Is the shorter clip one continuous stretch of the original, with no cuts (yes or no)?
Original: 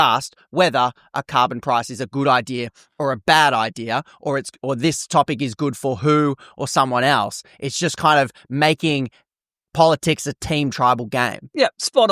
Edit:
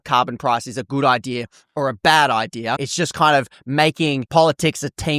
no